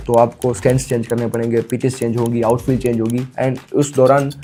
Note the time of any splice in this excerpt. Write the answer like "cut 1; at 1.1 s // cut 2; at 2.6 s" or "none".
none